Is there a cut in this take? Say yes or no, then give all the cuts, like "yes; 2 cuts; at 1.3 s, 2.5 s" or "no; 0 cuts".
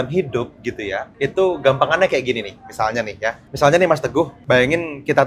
yes; 3 cuts; at 1.0 s, 3.4 s, 4.4 s